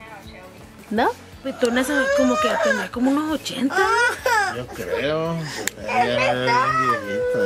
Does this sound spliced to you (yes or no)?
yes